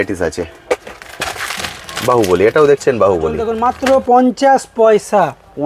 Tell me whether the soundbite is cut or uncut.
cut